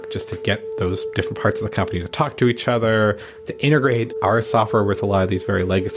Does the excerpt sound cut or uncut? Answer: uncut